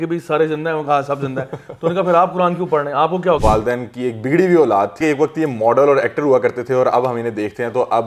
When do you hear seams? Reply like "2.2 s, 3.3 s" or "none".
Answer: 3.4 s, 5.0 s